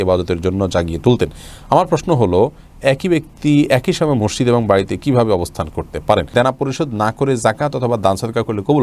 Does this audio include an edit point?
yes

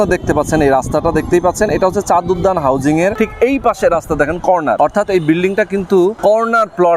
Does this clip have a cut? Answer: yes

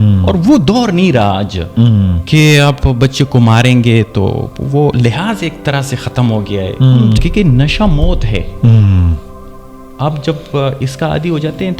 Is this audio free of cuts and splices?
no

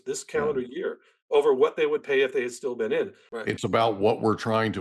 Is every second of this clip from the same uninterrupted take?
no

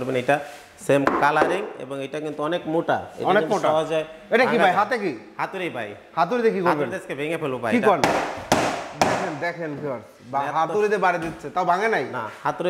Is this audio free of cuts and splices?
yes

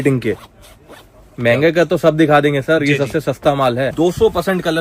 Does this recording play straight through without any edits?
no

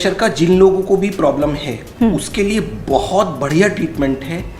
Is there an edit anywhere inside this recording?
no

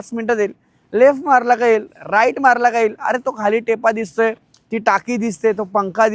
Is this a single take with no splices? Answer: yes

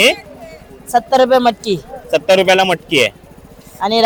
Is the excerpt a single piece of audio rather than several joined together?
yes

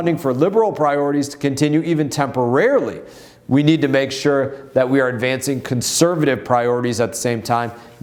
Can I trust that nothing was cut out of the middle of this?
yes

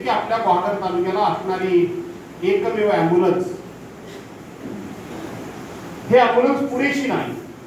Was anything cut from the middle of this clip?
no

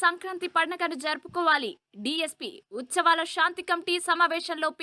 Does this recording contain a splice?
no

